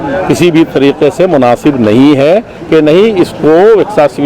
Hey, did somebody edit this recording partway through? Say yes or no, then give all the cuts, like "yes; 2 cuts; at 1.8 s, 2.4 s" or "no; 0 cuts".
yes; 1 cut; at 2.6 s